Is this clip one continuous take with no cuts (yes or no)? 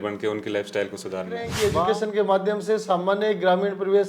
no